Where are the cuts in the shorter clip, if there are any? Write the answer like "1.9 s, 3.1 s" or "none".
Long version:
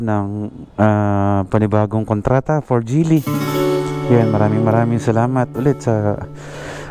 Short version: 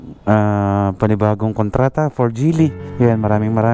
2.8 s